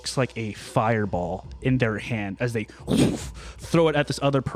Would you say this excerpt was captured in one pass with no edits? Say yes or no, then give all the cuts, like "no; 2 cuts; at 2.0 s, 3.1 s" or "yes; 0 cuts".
yes; 0 cuts